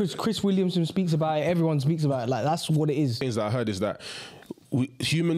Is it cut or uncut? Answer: cut